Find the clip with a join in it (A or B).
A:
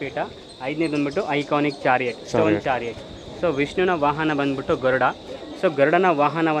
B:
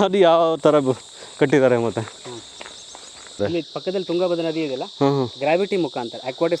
B